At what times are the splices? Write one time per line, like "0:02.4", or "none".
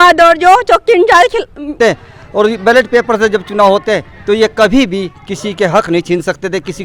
0:01.8